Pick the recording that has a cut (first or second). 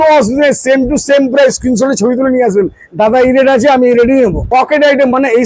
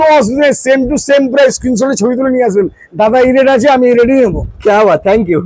first